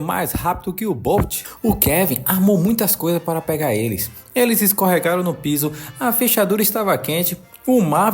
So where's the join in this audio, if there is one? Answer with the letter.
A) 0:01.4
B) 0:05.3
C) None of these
A